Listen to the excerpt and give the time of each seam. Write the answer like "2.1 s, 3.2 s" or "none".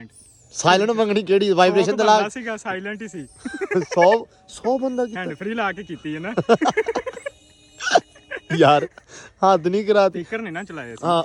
none